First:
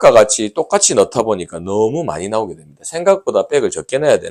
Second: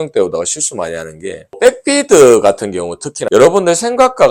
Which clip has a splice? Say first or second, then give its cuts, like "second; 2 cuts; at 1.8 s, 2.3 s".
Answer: second; 2 cuts; at 1.5 s, 3.3 s